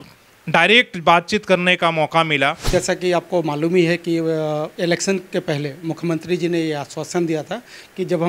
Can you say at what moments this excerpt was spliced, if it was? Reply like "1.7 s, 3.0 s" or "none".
2.7 s

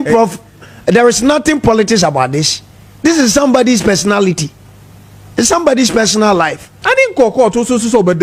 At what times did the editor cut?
6.7 s

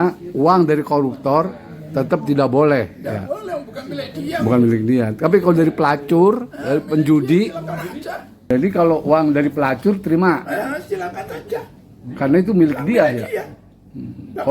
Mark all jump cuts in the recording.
8.5 s

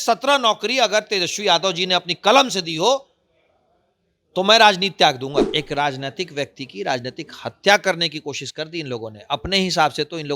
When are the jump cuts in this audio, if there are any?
5.5 s

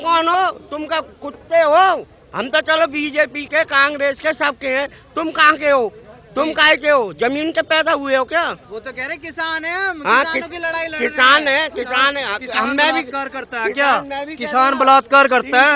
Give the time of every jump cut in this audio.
none

